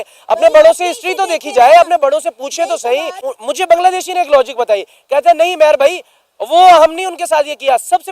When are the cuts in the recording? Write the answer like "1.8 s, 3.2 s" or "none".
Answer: 3.2 s